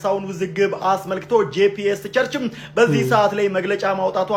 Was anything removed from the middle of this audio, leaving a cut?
no; 0 cuts

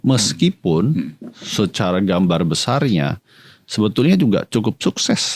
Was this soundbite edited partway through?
no; 0 cuts

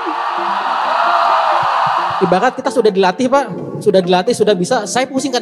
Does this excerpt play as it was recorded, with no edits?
no; 1 cut; at 2.1 s

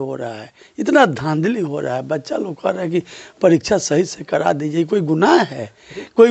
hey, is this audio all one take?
yes; 0 cuts

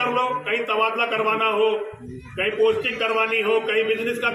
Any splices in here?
no; 0 cuts

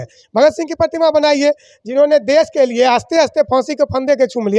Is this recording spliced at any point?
no; 0 cuts

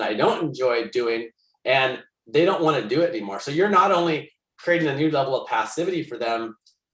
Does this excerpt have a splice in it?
no; 0 cuts

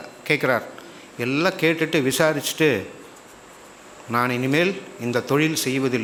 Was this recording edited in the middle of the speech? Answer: no; 0 cuts

